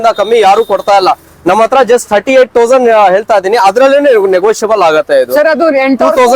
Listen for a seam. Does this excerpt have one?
no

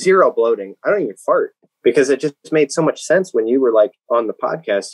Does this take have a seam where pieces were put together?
yes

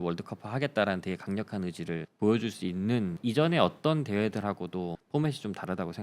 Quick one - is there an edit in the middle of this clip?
yes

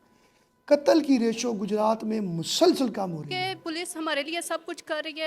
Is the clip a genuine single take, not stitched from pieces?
no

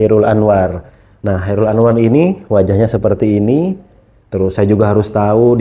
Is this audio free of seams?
yes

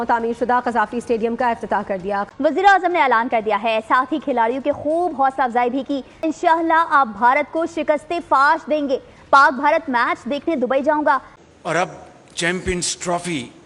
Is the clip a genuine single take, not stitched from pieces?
no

